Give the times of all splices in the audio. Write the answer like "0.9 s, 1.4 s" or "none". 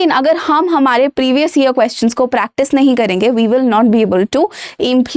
none